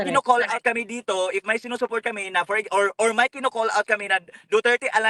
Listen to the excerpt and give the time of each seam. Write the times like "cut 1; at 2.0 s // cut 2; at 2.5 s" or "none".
none

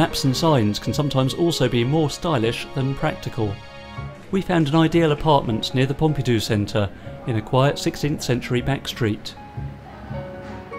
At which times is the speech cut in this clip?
cut 1; at 9.0 s

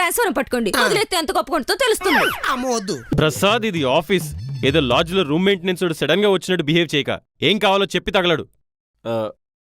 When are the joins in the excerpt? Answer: cut 1; at 3.1 s

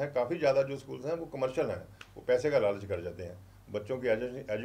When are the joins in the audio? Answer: none

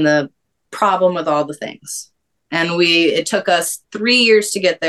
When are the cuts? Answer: none

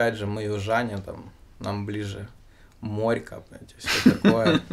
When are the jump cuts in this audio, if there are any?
none

